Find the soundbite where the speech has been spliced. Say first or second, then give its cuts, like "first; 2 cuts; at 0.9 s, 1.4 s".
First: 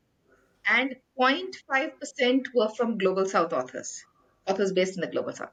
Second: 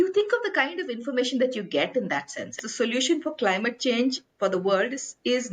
second; 1 cut; at 2.6 s